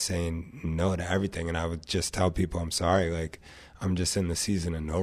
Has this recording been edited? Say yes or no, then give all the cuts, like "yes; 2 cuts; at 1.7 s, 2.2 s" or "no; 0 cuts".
no; 0 cuts